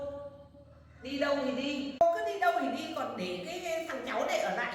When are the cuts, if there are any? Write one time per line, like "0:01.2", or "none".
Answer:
0:02.0